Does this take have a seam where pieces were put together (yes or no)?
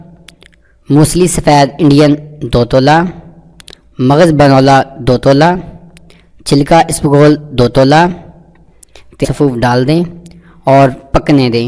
no